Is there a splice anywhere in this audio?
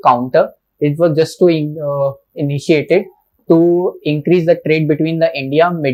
no; 0 cuts

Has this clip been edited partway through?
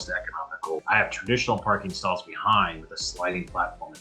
no; 0 cuts

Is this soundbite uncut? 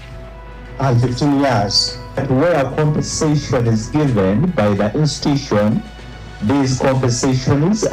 no; 1 cut; at 2.2 s

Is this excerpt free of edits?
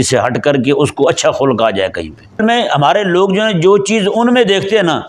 no; 1 cut; at 2.4 s

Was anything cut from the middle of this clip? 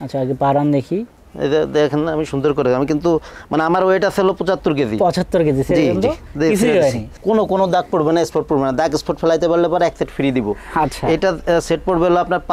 no; 0 cuts

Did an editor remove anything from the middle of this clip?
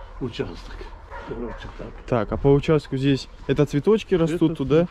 no; 0 cuts

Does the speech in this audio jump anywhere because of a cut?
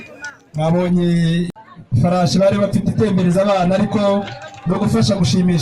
yes; 1 cut; at 1.6 s

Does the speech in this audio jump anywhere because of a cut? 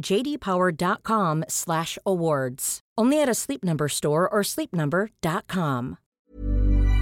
yes; 1 cut; at 6.1 s

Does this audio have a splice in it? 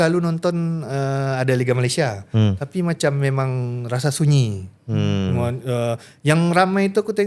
no; 0 cuts

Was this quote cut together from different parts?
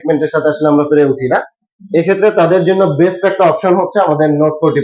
no; 0 cuts

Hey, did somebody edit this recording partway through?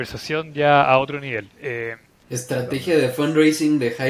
yes; 1 cut; at 2.1 s

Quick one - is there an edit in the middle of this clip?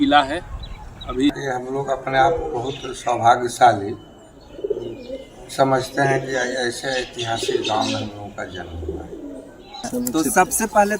yes; 2 cuts; at 1.4 s, 9.9 s

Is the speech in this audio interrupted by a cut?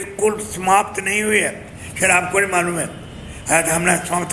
no; 0 cuts

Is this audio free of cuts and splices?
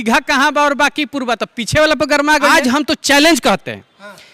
no; 1 cut; at 2.5 s

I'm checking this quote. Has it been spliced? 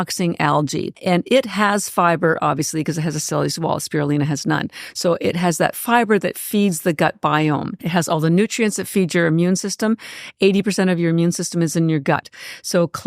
yes; 2 cuts; at 1.0 s, 7.7 s

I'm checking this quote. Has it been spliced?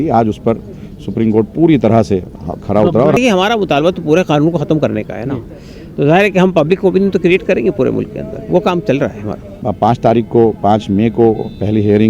yes; 2 cuts; at 3.2 s, 9.6 s

